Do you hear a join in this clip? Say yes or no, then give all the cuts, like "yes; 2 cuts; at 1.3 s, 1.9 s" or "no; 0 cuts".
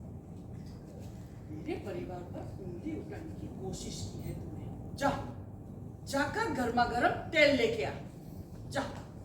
yes; 1 cut; at 4.8 s